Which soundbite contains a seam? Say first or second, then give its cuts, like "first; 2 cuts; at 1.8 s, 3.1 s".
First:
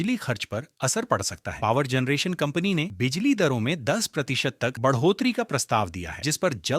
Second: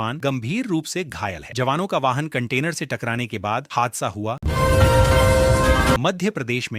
second; 2 cuts; at 4.4 s, 6.0 s